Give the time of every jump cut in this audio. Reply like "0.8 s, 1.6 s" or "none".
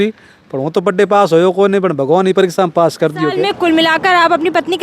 3.4 s